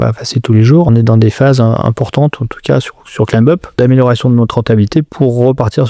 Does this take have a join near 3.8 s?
yes; 3 cuts; at 0.9 s, 3.8 s, 5.1 s

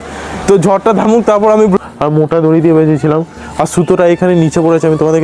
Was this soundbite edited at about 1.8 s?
yes; 1 cut; at 1.8 s

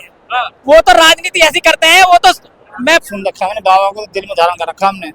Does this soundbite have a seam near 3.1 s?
yes; 1 cut; at 3.1 s

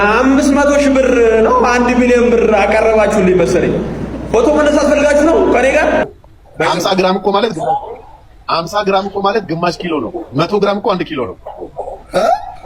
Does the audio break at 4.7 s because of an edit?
no; 1 cut; at 6.0 s

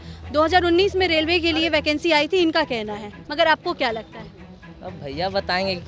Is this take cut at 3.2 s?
yes; 1 cut; at 3.2 s

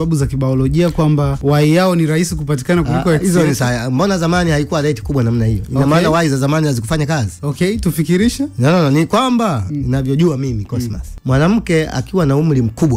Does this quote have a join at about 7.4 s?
no; 2 cuts; at 1.3 s, 11.1 s

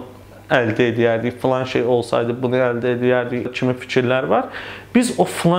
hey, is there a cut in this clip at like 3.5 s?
yes; 1 cut; at 3.5 s

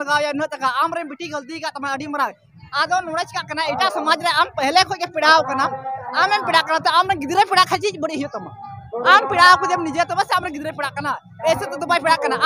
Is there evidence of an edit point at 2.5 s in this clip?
yes; 1 cut; at 2.5 s

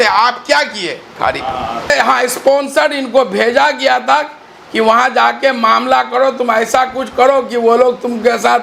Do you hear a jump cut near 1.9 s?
yes; 1 cut; at 1.9 s

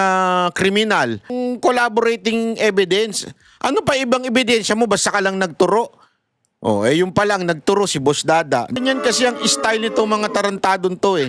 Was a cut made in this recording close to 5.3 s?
no; 2 cuts; at 1.3 s, 8.8 s

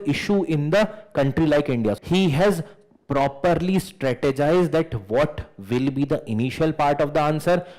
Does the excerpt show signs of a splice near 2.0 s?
yes; 1 cut; at 2.0 s

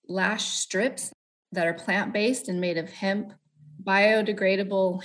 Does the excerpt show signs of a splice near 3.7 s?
yes; 2 cuts; at 1.0 s, 3.7 s

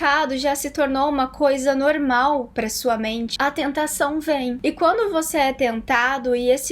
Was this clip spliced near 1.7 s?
no; 2 cuts; at 3.3 s, 4.6 s

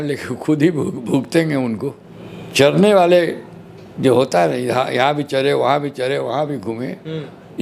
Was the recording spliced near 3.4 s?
no; 1 cut; at 2.0 s

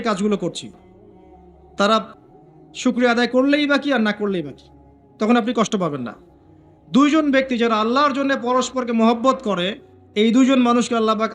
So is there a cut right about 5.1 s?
no; 0 cuts

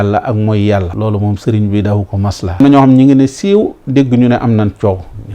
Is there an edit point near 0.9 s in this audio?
yes; 2 cuts; at 0.9 s, 2.6 s

